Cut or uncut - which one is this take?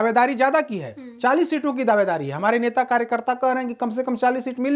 uncut